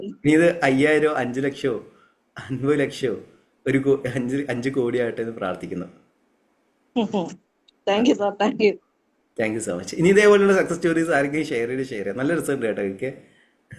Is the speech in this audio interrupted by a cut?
no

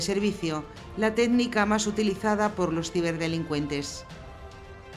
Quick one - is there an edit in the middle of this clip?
yes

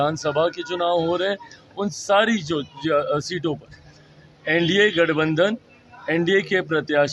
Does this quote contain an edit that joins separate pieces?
no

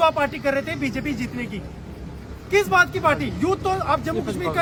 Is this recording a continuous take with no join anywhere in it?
yes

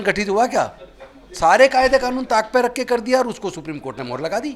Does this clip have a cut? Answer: no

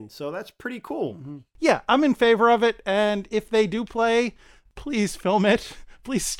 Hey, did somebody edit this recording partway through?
yes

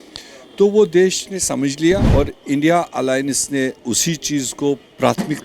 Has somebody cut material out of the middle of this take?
yes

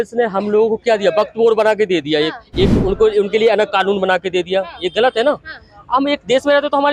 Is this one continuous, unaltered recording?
yes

